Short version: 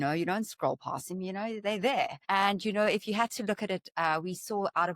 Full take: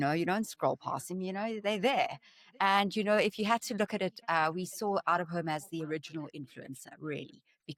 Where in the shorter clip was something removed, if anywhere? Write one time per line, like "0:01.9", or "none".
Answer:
0:02.2

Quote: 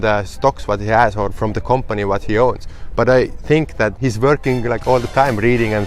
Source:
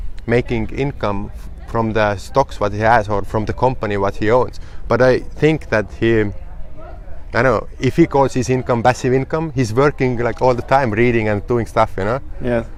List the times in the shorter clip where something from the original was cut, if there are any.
0:04.0

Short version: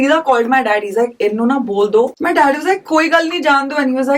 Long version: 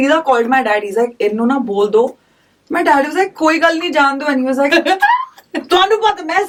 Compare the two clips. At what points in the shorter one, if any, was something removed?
0:02.2

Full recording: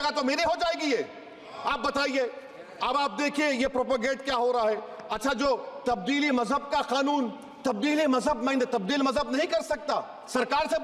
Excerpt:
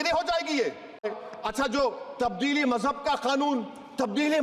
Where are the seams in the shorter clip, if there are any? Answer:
0:01.1

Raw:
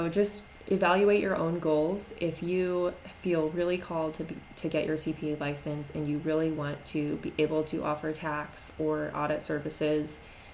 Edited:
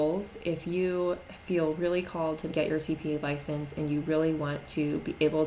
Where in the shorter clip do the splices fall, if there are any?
0:02.5

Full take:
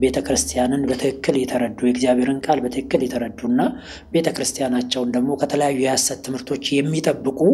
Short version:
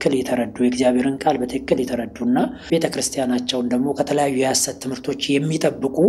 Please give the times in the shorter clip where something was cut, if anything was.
0:02.6

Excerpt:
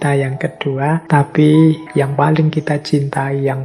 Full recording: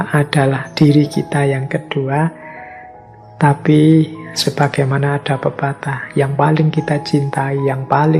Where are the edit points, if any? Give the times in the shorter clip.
0:01.0
0:01.8

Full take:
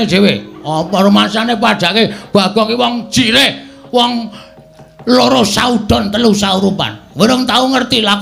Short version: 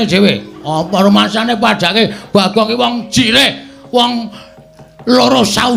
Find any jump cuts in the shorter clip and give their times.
none

